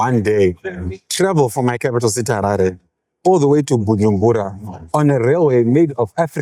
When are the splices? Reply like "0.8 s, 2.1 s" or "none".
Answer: none